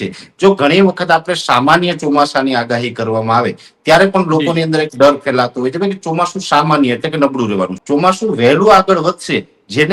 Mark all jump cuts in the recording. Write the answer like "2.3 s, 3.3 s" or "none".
7.8 s